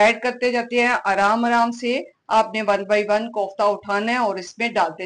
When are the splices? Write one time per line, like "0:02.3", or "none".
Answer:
none